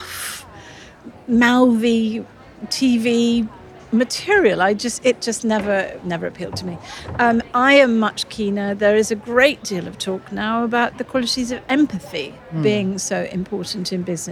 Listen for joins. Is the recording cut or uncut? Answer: uncut